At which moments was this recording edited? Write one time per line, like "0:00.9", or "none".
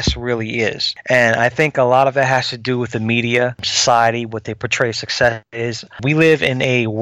0:00.9
0:03.7
0:06.0